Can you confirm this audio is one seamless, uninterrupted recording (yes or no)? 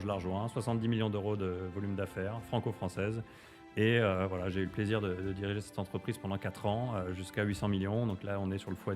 yes